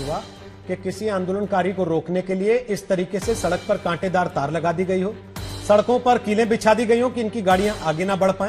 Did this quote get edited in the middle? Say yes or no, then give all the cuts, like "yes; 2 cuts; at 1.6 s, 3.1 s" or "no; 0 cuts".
no; 0 cuts